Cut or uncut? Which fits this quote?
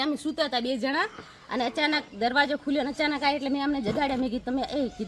uncut